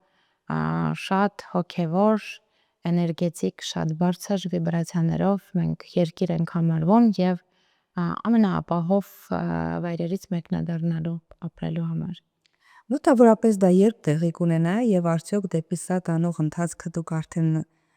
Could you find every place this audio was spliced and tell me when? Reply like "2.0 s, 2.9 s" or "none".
none